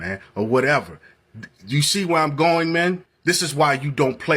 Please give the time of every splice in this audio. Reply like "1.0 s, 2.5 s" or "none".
3.1 s